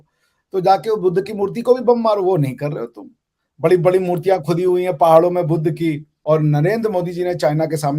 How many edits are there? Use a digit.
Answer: 1